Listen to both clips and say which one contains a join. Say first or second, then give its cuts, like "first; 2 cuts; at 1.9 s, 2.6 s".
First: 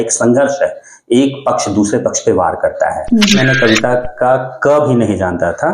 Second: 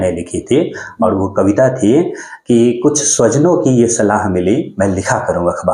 first; 1 cut; at 3.4 s